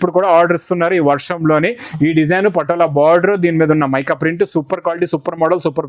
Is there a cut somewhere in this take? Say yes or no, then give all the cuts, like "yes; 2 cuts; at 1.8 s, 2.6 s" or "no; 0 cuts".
no; 0 cuts